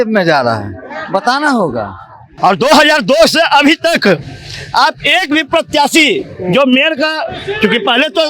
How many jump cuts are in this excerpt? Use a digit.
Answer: 1